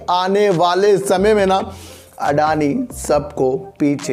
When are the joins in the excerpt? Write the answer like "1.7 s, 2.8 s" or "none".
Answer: none